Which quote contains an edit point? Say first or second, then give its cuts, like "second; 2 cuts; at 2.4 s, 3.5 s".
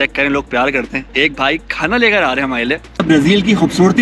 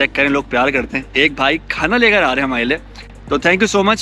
first; 1 cut; at 3.0 s